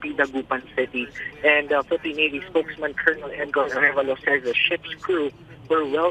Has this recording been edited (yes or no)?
no